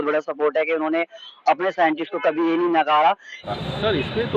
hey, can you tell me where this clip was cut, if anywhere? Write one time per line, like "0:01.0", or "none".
0:03.5